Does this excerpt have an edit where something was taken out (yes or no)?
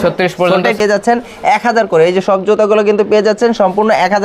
yes